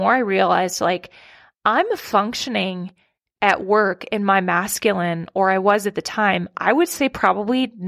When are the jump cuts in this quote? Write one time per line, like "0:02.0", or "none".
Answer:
none